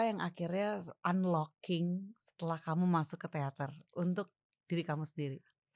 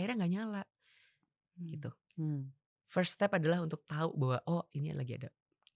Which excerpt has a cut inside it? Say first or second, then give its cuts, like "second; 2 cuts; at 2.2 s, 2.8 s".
first; 1 cut; at 1.0 s